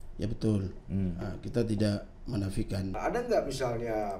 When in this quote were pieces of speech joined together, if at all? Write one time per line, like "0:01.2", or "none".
0:02.9